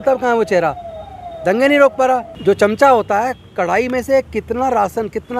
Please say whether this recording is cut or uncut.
cut